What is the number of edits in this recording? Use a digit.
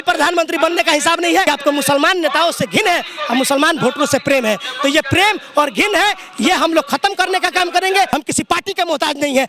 2